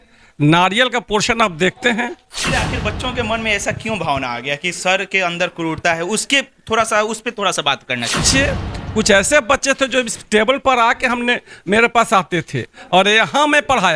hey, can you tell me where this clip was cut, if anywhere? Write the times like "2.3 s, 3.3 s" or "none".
2.3 s, 8.2 s